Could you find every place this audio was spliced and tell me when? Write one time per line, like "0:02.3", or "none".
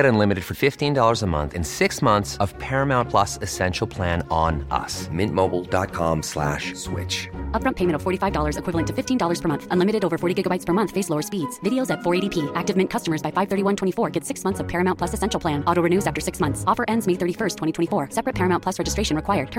none